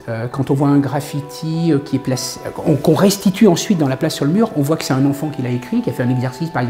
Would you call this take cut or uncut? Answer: uncut